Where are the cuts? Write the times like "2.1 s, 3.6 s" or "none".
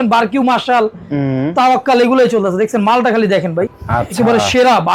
none